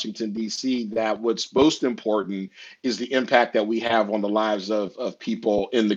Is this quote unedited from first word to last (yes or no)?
yes